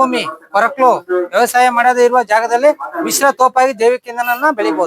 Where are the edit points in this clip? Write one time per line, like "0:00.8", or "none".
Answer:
none